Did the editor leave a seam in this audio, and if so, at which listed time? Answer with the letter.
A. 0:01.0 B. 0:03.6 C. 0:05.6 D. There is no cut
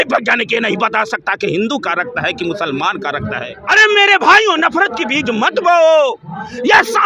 B